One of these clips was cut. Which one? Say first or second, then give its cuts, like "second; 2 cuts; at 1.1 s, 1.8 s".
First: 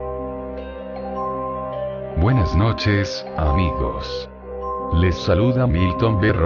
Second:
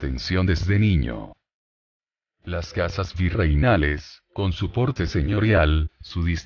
first; 1 cut; at 4.4 s